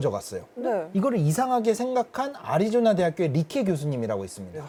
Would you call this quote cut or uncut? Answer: uncut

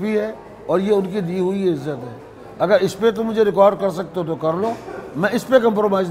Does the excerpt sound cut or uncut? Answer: uncut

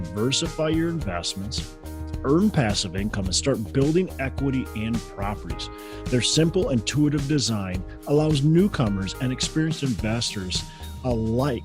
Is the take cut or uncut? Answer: uncut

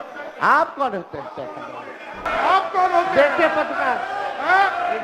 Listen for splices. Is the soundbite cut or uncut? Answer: cut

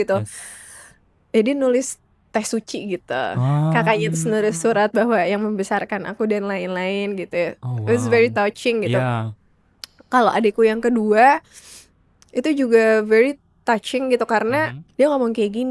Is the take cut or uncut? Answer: cut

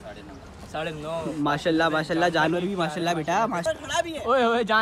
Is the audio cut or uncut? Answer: cut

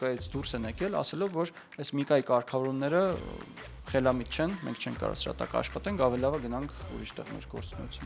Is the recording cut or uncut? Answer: uncut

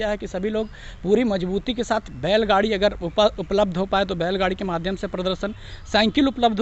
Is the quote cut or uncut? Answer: uncut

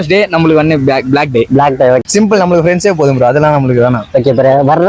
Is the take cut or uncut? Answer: cut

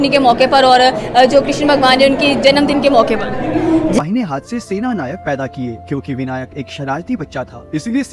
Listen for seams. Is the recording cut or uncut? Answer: cut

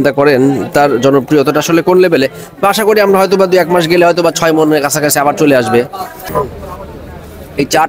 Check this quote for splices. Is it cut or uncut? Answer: cut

